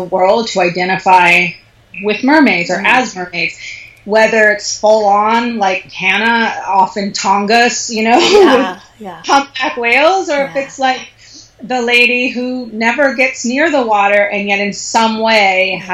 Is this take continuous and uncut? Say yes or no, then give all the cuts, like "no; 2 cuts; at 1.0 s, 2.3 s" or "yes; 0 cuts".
yes; 0 cuts